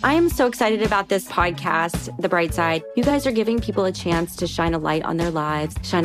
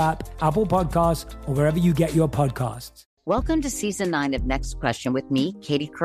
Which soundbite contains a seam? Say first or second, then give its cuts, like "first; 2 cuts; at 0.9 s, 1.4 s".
second; 1 cut; at 3.0 s